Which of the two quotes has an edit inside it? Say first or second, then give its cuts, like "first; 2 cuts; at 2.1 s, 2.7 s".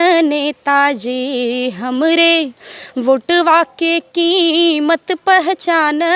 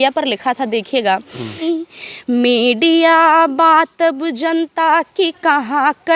second; 1 cut; at 1.6 s